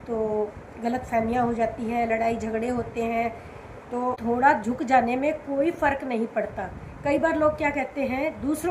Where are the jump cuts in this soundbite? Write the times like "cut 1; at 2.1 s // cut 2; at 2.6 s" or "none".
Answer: cut 1; at 3.9 s